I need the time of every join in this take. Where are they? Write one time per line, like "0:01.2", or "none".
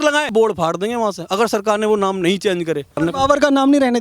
0:03.0